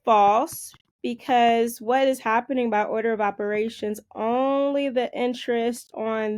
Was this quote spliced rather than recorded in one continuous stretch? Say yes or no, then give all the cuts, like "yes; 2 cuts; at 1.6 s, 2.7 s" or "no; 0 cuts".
no; 0 cuts